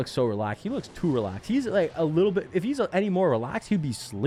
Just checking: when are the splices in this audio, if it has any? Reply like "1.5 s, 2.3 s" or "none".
none